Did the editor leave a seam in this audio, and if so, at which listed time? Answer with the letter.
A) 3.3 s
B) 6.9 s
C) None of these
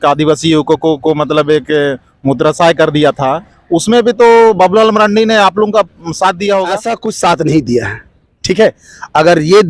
B